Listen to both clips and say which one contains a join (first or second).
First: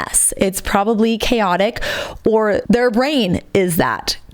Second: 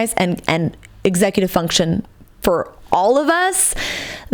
first